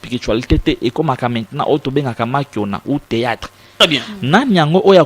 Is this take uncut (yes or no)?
no